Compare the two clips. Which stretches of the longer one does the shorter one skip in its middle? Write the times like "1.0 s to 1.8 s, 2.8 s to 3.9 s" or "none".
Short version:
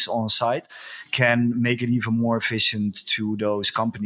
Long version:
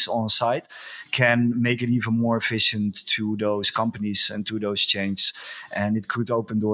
none

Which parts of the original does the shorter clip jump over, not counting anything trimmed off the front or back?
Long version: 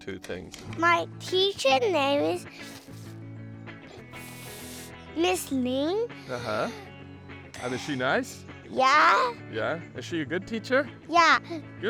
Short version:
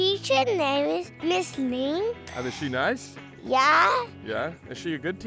2.5 s to 5.0 s, 6.2 s to 7.5 s

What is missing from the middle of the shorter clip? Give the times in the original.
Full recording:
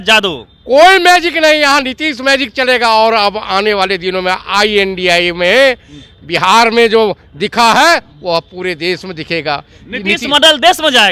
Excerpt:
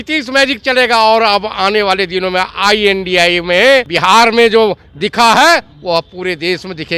5.8 s to 6.3 s

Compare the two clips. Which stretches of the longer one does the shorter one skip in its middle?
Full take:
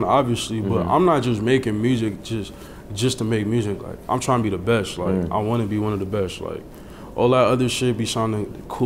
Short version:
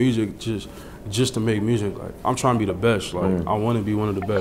none

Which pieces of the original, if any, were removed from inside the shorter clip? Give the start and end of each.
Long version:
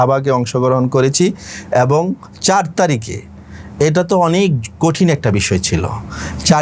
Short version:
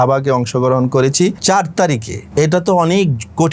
1.4 s to 2.4 s, 3.2 s to 3.6 s

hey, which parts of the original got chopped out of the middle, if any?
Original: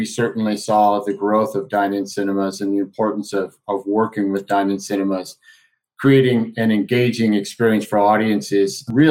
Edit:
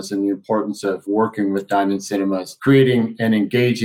3.5 s to 3.8 s, 5.3 s to 5.9 s

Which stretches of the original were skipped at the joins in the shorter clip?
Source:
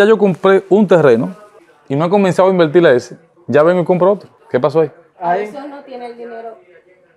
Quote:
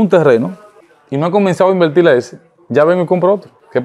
none

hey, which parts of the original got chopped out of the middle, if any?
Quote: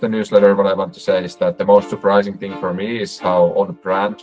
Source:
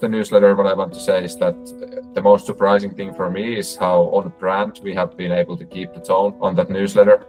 1.6 s to 2.1 s

